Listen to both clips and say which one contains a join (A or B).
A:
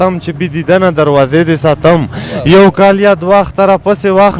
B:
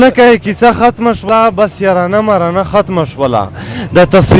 B